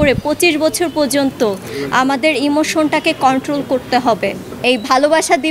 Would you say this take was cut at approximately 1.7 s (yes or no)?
no